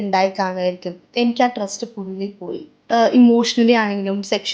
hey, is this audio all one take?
no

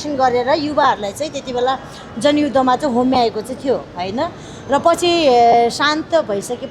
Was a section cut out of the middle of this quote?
no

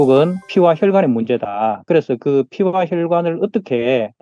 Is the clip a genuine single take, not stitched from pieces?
yes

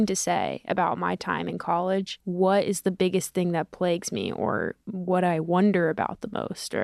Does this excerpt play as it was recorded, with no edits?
no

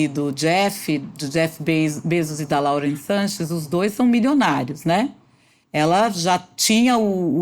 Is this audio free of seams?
yes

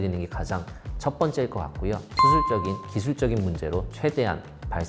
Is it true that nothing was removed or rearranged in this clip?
no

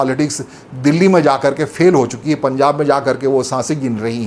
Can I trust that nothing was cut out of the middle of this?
yes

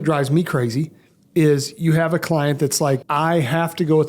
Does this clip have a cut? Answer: yes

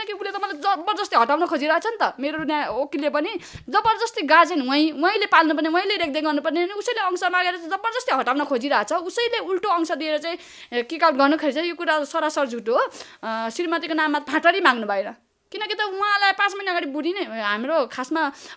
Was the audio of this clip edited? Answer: no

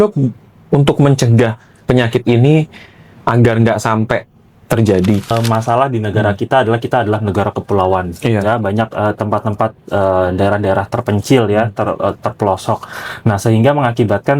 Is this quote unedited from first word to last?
no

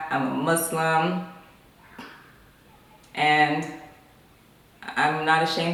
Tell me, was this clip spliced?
no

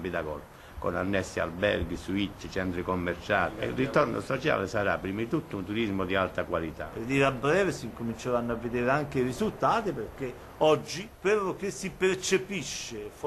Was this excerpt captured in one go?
yes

